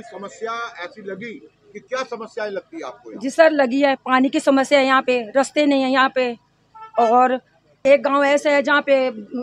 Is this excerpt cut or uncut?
cut